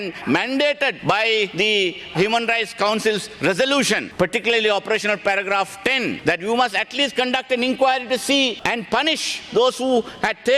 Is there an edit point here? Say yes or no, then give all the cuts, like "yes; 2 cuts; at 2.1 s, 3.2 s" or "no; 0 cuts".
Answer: yes; 4 cuts; at 1.3 s, 4.1 s, 6.2 s, 8.6 s